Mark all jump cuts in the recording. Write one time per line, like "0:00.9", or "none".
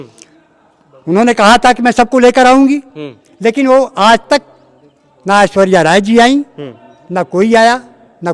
none